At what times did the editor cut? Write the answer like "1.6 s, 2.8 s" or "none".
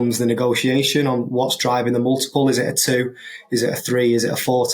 none